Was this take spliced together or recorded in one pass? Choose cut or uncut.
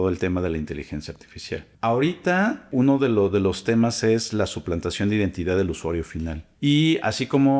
cut